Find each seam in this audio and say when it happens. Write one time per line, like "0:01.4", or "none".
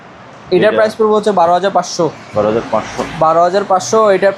none